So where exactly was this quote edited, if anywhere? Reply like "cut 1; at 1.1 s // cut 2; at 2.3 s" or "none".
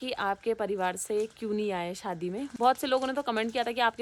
none

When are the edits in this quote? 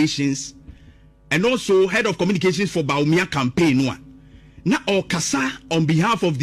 none

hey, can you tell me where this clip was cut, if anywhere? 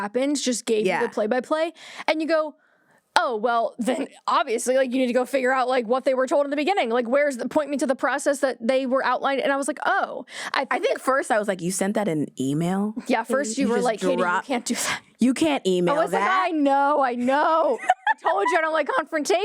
none

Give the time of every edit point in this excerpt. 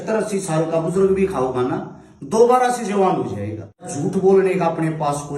cut 1; at 3.9 s

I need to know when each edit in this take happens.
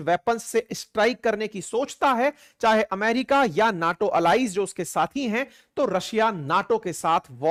none

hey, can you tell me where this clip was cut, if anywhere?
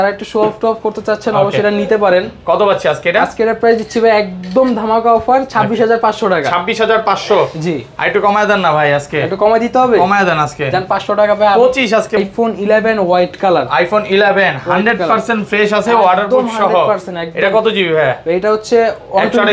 cut 1; at 12.2 s

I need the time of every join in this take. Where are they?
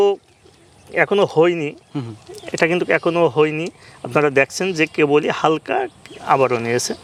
none

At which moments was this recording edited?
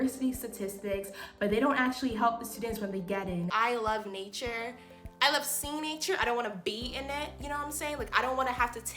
cut 1; at 3.5 s

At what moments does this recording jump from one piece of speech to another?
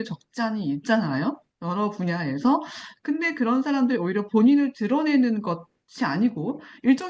none

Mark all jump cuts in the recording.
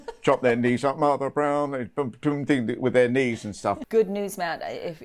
cut 1; at 3.8 s

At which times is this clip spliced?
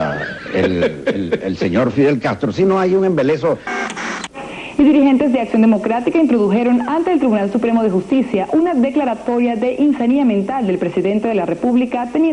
none

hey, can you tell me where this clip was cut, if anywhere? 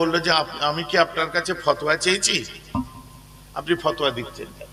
none

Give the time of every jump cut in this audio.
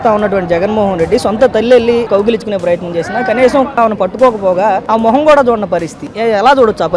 cut 1; at 2.1 s // cut 2; at 3.7 s // cut 3; at 4.8 s // cut 4; at 6.1 s

